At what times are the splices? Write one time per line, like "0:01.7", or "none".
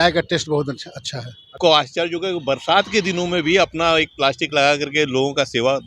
0:01.6